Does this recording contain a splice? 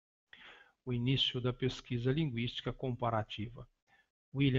yes; 1 cut; at 1.0 s

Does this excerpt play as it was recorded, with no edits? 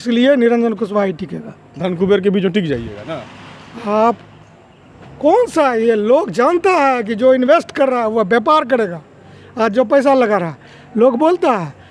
yes; 0 cuts

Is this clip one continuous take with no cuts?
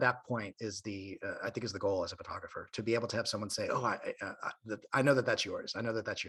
yes; 0 cuts

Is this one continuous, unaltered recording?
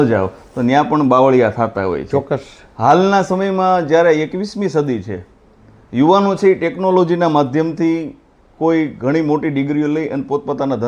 no; 1 cut; at 2.4 s

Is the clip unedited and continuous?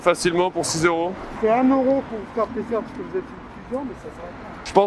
yes; 0 cuts

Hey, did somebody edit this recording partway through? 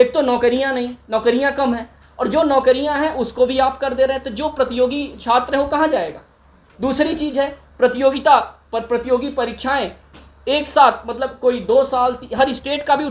no; 0 cuts

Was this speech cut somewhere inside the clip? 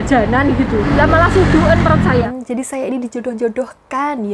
yes; 2 cuts; at 0.8 s, 2.3 s

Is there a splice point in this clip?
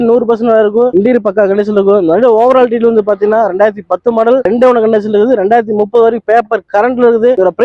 no; 0 cuts

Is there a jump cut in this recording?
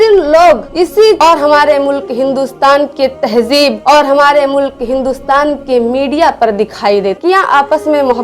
yes; 2 cuts; at 1.2 s, 7.2 s

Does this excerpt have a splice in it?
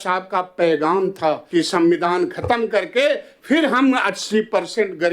yes; 1 cut; at 1.4 s

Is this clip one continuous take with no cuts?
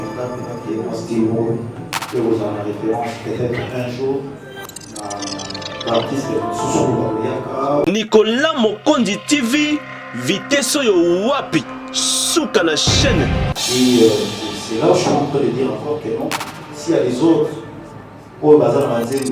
no; 2 cuts; at 7.8 s, 13.5 s

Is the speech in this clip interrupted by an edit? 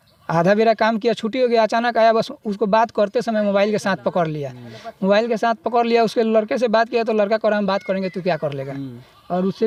no; 0 cuts

